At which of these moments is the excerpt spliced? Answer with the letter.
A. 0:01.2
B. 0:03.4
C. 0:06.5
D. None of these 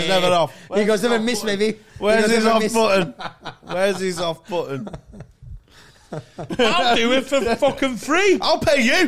C